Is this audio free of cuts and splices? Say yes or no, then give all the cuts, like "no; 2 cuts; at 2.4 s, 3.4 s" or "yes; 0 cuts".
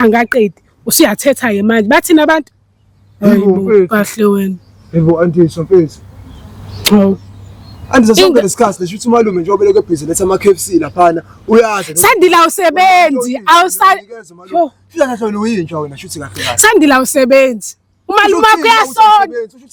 yes; 0 cuts